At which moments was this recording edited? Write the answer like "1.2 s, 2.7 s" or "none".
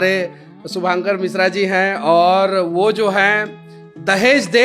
none